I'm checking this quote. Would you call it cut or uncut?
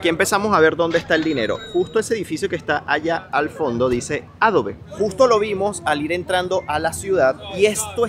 uncut